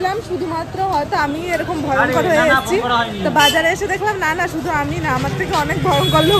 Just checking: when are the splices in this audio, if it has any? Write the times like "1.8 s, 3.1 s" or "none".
none

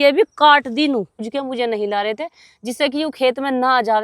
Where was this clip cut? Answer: 1.2 s

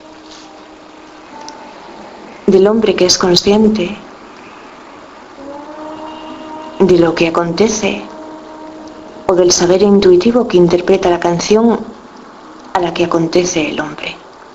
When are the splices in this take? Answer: none

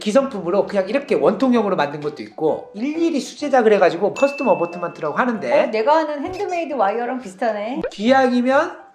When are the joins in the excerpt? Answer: 4.1 s, 7.8 s

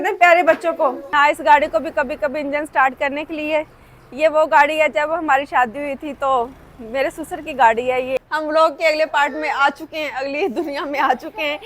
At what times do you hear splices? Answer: 1.0 s, 8.2 s

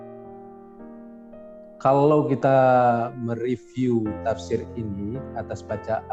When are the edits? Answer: none

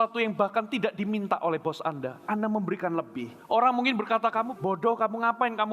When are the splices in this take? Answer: 3.3 s, 4.5 s

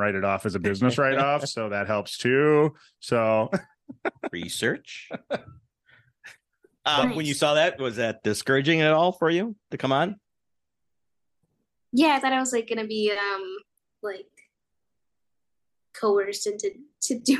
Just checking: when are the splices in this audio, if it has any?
none

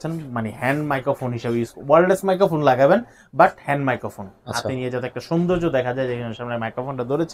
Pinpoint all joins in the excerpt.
none

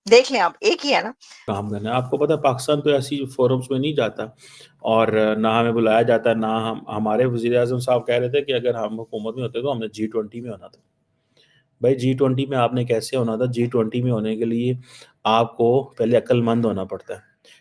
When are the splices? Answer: 1.5 s

